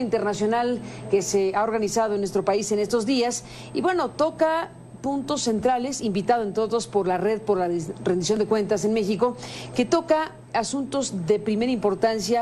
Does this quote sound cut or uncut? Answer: cut